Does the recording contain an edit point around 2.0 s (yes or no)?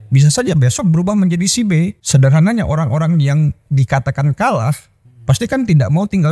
yes